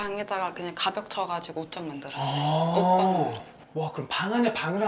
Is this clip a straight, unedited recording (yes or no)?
no